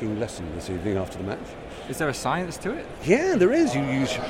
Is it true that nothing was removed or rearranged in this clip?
yes; 0 cuts

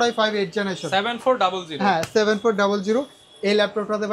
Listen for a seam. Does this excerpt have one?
no; 0 cuts

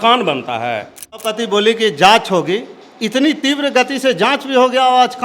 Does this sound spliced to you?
yes; 1 cut; at 1.3 s

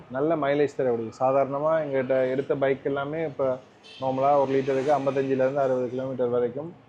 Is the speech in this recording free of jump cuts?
yes; 0 cuts

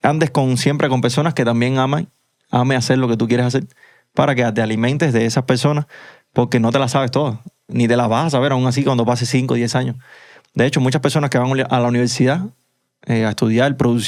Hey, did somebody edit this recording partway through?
no; 0 cuts

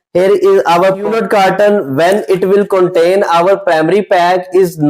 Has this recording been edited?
yes; 1 cut; at 1.1 s

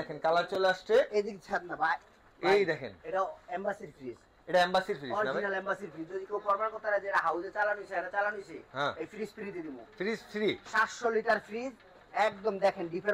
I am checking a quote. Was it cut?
no; 0 cuts

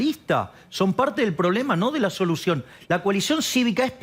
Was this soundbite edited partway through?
no; 0 cuts

